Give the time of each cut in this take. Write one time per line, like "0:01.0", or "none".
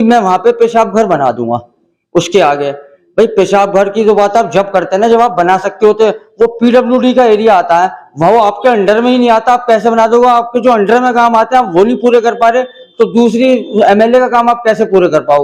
none